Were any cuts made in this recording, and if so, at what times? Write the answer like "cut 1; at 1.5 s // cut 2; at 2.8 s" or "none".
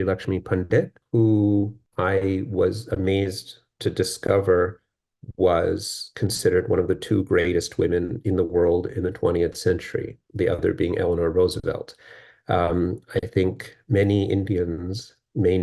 cut 1; at 1.0 s // cut 2; at 1.8 s